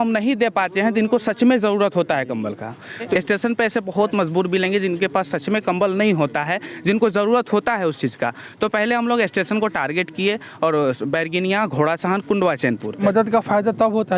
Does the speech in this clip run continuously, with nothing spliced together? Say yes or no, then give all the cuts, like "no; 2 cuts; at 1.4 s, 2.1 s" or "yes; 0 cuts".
no; 2 cuts; at 3.1 s, 13.0 s